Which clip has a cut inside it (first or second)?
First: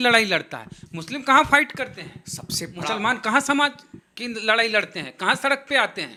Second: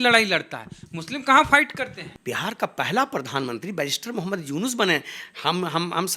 second